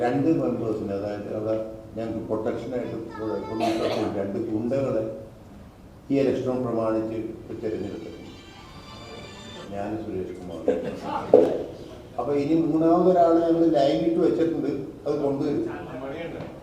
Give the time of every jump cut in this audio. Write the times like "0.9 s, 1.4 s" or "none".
none

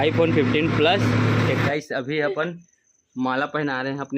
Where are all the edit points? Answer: 1.5 s

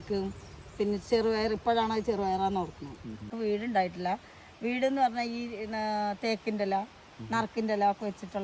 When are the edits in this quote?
3.3 s

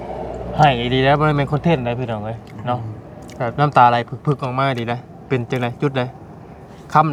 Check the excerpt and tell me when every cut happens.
none

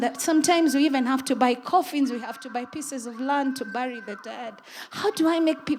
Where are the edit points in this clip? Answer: none

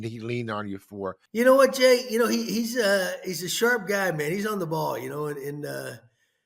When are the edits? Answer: 1.2 s

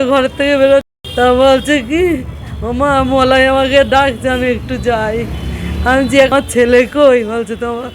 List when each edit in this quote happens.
0.9 s, 6.3 s

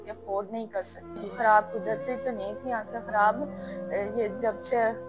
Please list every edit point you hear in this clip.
1.2 s

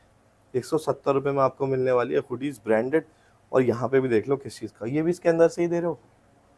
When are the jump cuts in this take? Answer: none

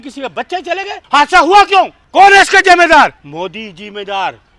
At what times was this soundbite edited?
1.0 s, 2.0 s, 3.2 s

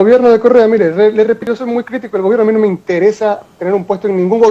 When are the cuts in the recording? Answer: 1.4 s

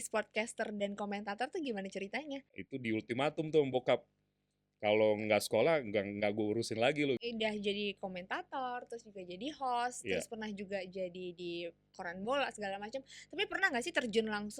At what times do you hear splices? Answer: 2.6 s, 7.2 s

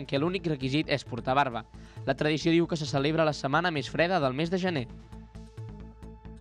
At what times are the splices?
4.9 s

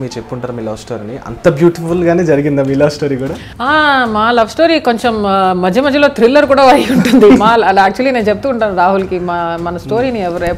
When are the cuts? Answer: 3.5 s

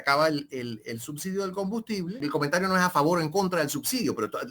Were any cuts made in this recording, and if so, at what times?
2.2 s

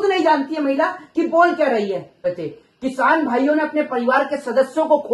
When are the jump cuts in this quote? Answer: 2.2 s

